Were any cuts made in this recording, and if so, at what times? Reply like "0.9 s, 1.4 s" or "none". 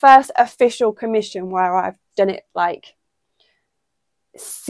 none

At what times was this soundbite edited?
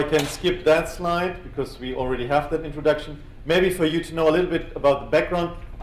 4.9 s

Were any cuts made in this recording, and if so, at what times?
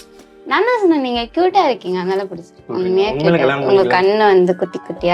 2.7 s

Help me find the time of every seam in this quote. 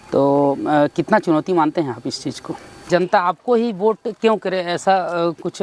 2.7 s

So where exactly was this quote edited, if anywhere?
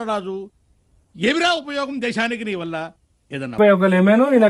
3.6 s

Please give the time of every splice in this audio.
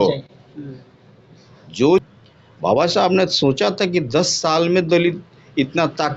2.1 s

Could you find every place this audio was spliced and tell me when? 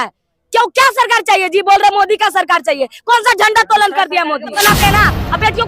4.5 s

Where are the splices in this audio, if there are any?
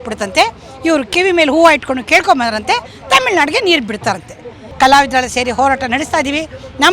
4.6 s

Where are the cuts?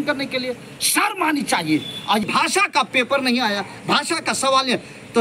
2.2 s

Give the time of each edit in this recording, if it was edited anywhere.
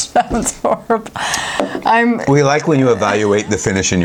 none

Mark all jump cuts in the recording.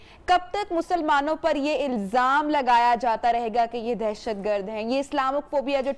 none

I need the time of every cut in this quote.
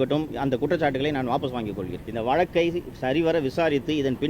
2.0 s

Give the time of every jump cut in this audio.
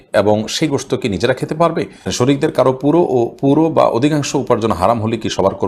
2.1 s

